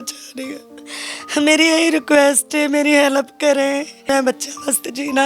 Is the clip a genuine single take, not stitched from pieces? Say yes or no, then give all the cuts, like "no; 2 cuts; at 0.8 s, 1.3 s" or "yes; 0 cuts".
no; 1 cut; at 4.1 s